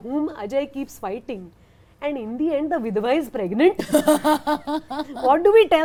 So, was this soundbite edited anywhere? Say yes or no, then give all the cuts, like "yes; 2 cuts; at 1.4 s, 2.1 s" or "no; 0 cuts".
no; 0 cuts